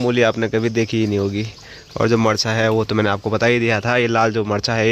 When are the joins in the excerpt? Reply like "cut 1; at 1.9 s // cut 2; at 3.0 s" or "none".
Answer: none